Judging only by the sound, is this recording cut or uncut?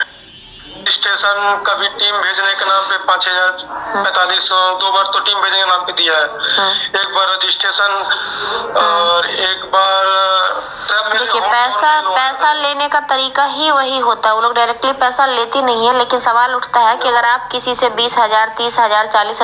uncut